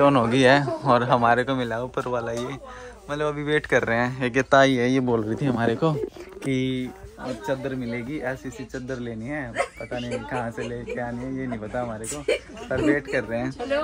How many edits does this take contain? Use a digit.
0